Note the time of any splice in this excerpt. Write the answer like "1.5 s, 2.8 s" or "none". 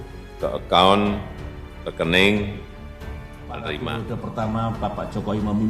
4.1 s